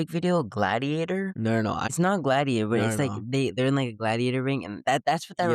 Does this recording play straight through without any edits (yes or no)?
no